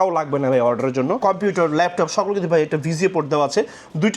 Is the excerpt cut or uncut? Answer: cut